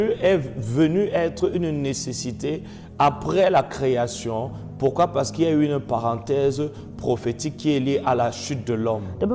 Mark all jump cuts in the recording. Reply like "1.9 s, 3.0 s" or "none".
none